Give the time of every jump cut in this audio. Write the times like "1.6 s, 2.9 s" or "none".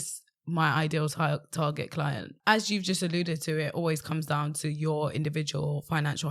2.3 s